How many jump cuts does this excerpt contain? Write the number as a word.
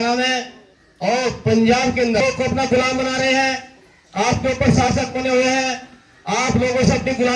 one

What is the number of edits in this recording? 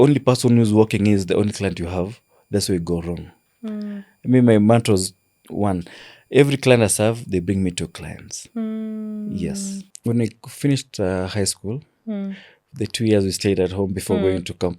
one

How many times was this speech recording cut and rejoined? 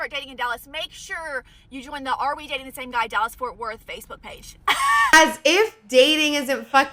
one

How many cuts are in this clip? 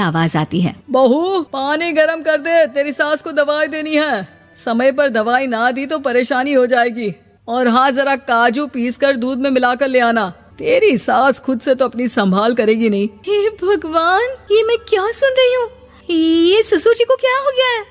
zero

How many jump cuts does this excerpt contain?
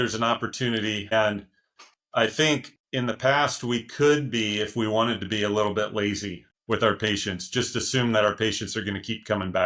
zero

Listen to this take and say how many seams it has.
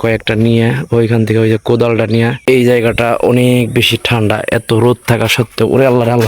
one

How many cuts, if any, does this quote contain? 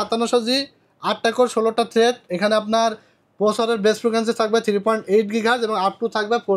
zero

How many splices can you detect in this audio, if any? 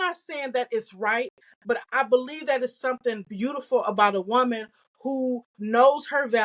one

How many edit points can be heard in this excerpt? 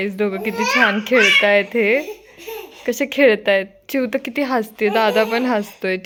zero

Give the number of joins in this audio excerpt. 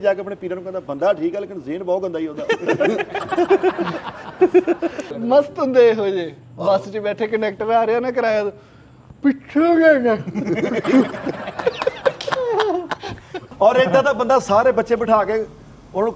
two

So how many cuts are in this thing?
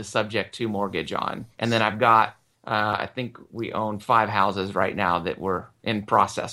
one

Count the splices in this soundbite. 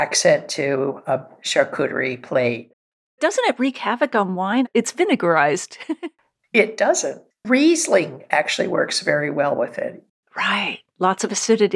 four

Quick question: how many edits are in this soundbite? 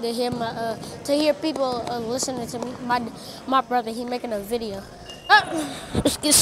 one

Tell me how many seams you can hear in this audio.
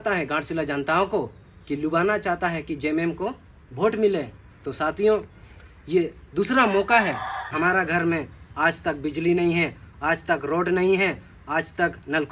one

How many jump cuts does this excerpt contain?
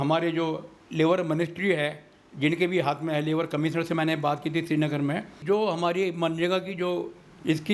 one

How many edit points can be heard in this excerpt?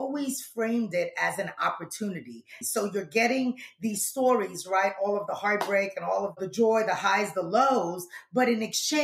two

